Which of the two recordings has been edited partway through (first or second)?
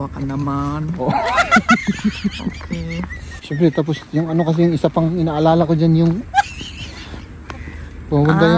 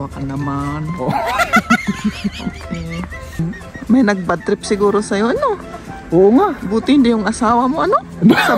second